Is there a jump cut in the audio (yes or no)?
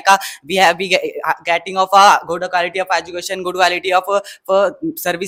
no